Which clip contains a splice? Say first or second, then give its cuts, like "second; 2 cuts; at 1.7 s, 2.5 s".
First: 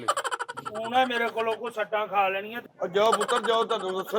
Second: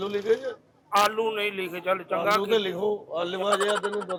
first; 1 cut; at 2.6 s